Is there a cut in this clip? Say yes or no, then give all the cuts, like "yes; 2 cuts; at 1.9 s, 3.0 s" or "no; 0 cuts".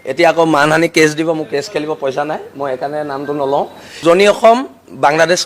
yes; 1 cut; at 3.8 s